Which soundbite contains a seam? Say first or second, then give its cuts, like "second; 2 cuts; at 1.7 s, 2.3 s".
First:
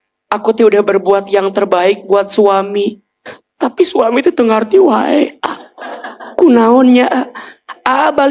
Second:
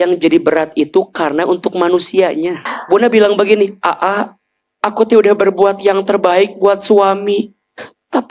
second; 1 cut; at 2.7 s